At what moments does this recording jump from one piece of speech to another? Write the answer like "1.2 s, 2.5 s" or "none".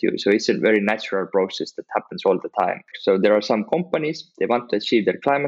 2.9 s